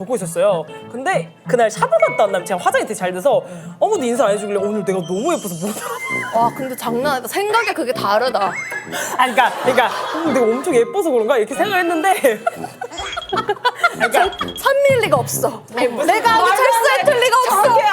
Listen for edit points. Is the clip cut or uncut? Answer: cut